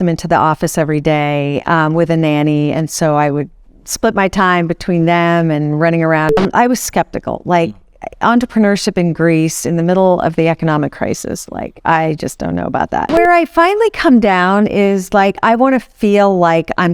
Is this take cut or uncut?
cut